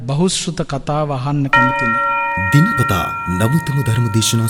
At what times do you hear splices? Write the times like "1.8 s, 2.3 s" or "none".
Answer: 1.5 s